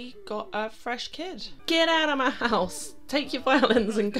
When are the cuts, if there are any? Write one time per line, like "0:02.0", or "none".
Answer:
0:01.6